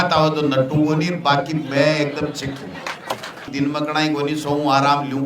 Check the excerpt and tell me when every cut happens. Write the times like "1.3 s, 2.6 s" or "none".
3.5 s